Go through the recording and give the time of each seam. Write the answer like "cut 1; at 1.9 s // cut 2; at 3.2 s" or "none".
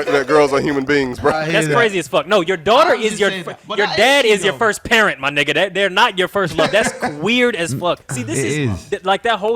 cut 1; at 1.4 s // cut 2; at 8.1 s